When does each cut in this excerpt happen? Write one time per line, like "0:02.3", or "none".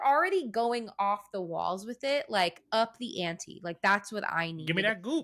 none